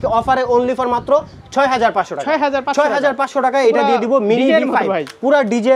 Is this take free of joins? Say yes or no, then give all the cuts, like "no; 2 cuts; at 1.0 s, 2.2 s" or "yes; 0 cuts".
yes; 0 cuts